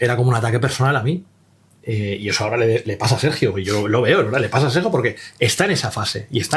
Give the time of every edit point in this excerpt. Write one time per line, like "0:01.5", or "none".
none